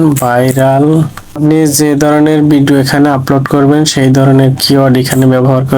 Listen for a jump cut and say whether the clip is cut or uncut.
cut